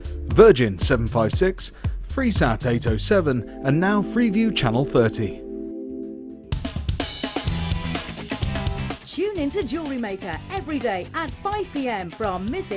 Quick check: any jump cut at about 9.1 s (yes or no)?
no